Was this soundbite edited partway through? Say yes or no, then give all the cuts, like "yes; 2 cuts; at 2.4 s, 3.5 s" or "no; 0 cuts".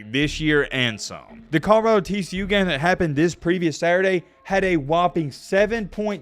yes; 1 cut; at 1.3 s